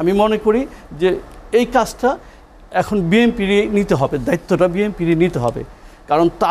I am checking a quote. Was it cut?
no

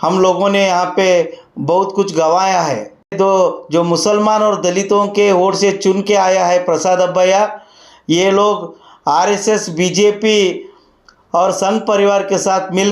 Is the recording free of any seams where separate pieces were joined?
no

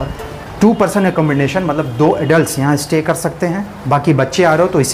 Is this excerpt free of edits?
yes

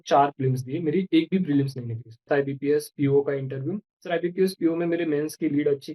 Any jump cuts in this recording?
yes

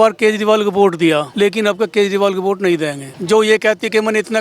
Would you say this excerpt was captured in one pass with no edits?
no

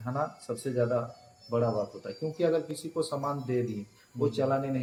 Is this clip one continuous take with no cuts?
yes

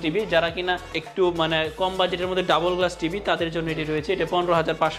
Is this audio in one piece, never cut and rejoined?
yes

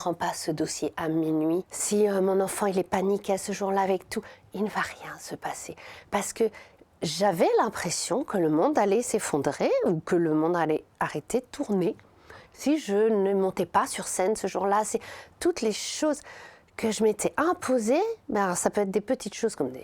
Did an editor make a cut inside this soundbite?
yes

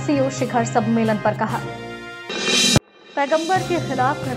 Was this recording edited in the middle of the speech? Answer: no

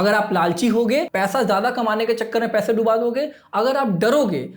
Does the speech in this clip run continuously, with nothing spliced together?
no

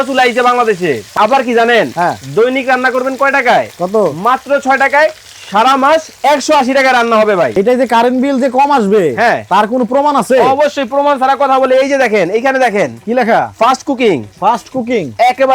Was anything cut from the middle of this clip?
yes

